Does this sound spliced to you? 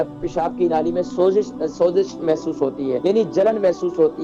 yes; 1 cut; at 3.0 s

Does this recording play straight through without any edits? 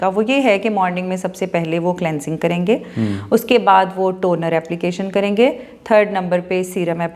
yes; 0 cuts

